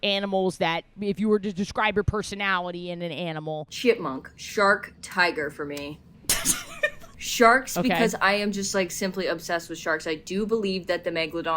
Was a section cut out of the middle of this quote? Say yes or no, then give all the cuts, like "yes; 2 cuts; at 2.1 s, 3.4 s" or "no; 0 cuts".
yes; 4 cuts; at 0.9 s, 3.7 s, 6.1 s, 7.1 s